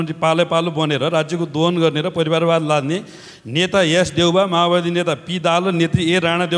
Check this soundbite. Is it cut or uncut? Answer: uncut